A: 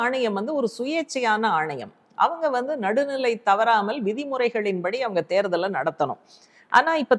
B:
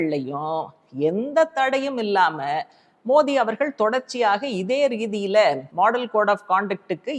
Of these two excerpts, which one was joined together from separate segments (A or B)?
B